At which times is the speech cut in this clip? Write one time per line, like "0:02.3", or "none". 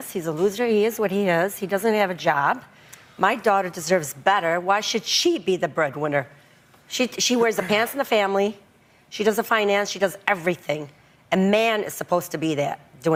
none